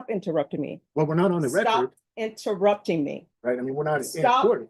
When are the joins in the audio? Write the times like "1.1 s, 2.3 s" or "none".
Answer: 3.3 s